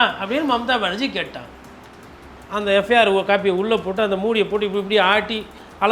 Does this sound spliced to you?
yes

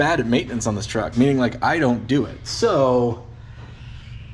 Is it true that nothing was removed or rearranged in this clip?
yes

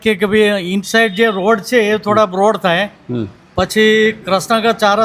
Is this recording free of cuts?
yes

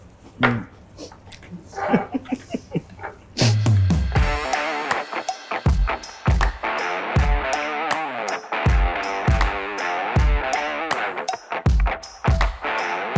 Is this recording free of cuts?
yes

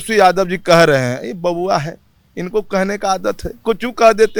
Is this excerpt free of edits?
yes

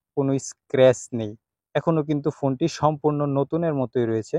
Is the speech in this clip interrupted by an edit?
no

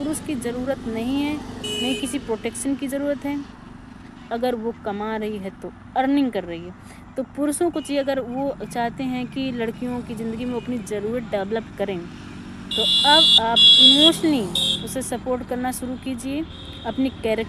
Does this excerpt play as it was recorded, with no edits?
no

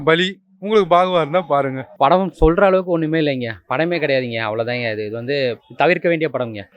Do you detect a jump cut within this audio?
no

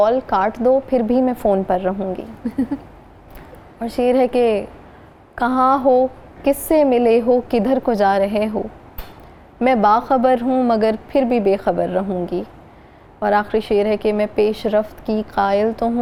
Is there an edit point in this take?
no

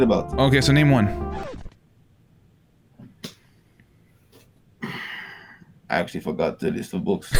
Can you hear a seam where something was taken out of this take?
no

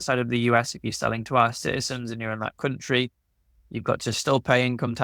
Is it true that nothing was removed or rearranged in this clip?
yes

